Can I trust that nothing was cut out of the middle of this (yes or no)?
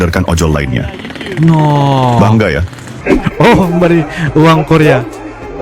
no